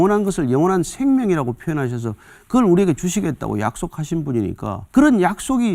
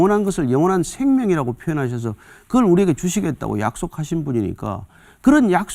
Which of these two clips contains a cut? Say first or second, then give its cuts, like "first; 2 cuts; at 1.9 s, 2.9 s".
first; 1 cut; at 4.8 s